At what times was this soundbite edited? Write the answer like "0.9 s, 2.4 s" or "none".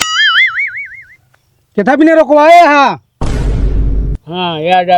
3.1 s, 4.2 s